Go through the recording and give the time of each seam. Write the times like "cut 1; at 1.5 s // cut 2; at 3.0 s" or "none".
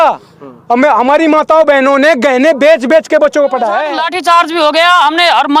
cut 1; at 3.8 s